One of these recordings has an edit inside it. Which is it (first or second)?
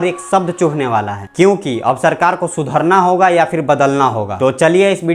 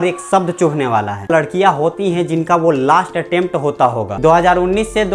second